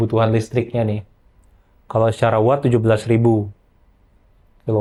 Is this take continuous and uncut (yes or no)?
yes